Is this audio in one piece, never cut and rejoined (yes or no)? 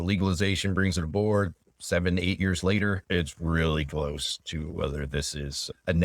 no